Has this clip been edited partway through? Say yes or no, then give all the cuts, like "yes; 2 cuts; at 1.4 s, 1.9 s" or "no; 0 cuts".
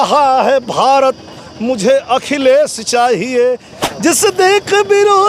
yes; 1 cut; at 3.4 s